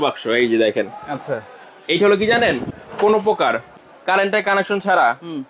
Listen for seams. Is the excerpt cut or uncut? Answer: uncut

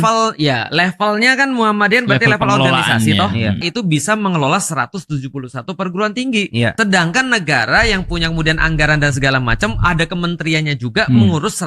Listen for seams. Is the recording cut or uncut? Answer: uncut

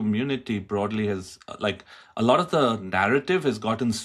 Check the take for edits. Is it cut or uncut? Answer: uncut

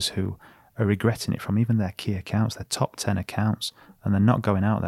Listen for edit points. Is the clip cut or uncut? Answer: uncut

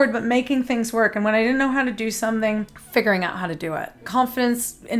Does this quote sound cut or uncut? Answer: cut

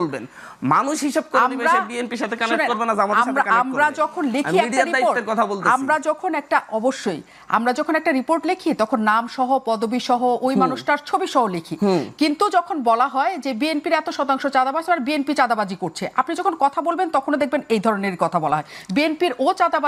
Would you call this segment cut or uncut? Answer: uncut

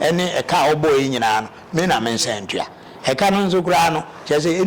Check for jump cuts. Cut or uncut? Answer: uncut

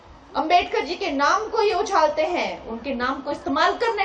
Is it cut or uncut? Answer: uncut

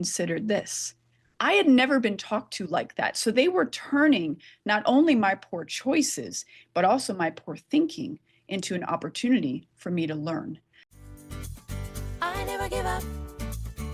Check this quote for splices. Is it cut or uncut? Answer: cut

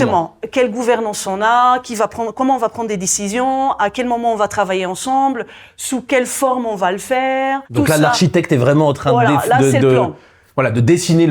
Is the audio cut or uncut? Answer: cut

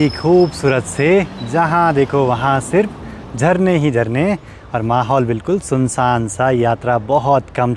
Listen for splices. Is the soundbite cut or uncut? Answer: uncut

